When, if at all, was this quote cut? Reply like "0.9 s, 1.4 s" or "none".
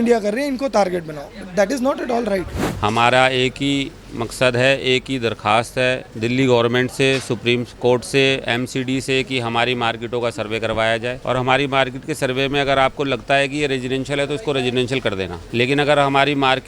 2.6 s, 6.1 s, 11.2 s, 15.4 s